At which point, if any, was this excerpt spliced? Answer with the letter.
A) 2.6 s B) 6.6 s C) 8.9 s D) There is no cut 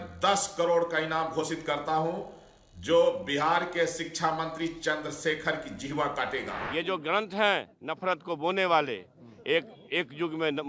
B